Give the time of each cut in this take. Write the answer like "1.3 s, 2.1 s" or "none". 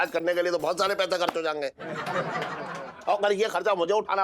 none